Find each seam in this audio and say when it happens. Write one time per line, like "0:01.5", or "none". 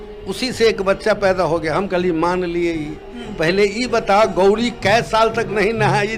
none